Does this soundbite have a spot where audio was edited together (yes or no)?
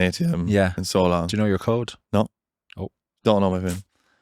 yes